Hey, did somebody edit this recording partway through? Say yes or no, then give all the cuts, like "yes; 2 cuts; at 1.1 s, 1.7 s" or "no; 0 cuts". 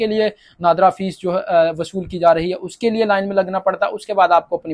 no; 0 cuts